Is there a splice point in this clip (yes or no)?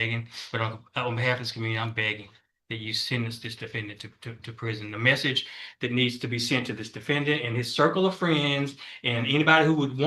no